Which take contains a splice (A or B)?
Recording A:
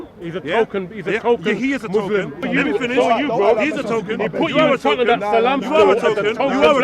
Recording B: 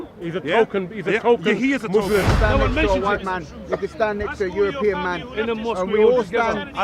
B